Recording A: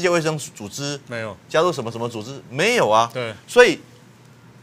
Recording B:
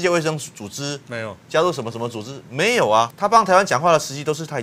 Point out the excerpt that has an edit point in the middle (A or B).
B